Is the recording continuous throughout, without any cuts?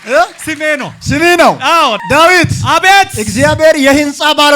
no; 1 cut; at 2.0 s

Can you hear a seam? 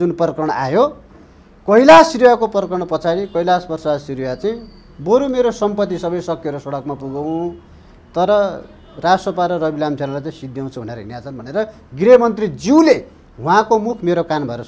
no; 0 cuts

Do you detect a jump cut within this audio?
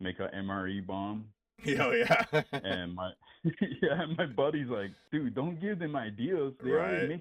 no; 0 cuts

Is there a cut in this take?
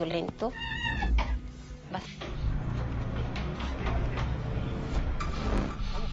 no; 0 cuts

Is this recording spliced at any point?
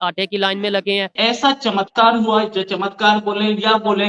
yes; 1 cut; at 1.1 s

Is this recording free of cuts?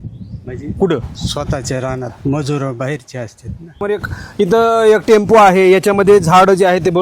no; 1 cut; at 3.8 s

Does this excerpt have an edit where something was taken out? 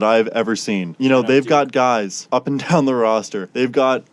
yes; 2 cuts; at 0.9 s, 2.2 s

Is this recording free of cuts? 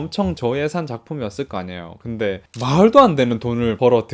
yes; 0 cuts

